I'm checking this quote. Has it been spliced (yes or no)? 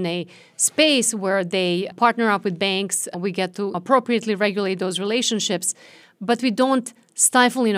yes